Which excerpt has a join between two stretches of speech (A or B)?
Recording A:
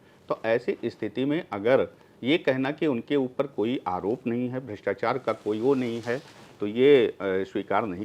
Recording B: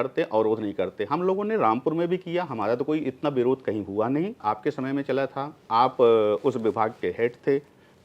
B